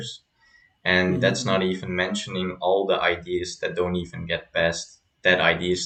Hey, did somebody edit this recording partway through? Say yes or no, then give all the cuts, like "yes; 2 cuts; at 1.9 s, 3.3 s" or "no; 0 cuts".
no; 0 cuts